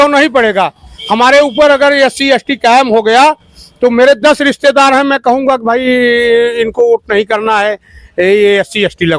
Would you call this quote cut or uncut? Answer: uncut